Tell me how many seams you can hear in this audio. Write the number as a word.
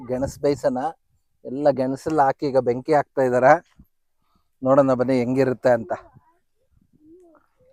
zero